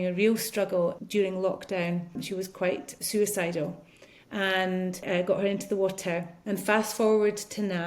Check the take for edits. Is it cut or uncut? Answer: cut